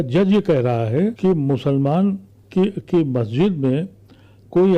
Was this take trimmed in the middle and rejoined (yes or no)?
yes